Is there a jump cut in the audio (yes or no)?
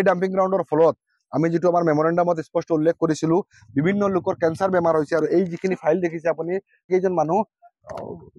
no